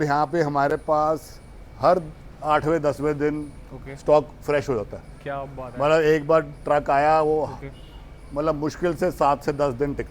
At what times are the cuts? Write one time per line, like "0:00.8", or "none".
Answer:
none